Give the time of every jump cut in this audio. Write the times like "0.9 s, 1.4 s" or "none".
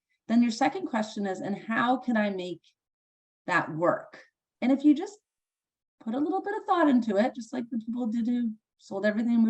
4.4 s